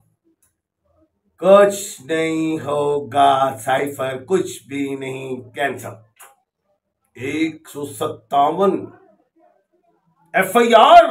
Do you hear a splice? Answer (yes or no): no